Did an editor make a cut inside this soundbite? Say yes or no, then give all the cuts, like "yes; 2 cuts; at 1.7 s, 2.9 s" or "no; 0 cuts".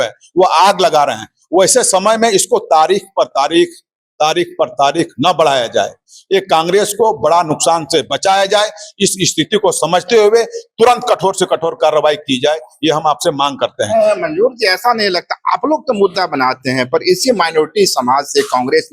no; 0 cuts